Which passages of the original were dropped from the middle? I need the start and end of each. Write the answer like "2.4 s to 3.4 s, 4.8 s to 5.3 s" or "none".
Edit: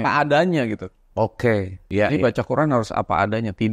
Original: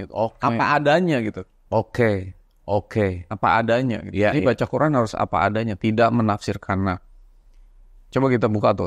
2.4 s to 4.1 s